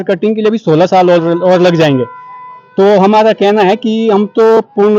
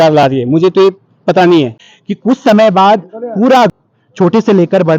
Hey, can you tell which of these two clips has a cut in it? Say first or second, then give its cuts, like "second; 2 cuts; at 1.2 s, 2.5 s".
second; 2 cuts; at 1.9 s, 3.7 s